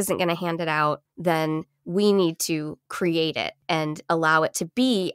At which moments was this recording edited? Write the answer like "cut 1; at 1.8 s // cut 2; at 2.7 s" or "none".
cut 1; at 1.1 s // cut 2; at 3.5 s